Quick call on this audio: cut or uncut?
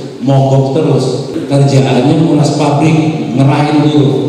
cut